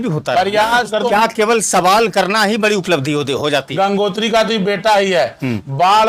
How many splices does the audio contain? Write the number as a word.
two